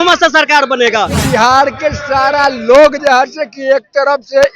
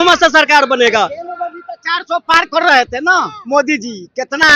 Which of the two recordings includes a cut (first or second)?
first